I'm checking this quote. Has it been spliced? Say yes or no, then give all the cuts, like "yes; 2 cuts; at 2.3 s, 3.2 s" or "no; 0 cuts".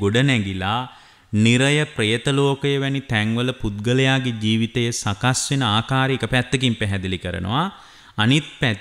no; 0 cuts